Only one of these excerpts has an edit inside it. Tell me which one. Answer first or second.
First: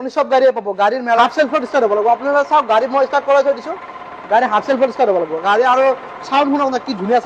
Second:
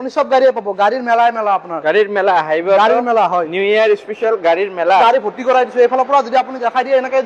first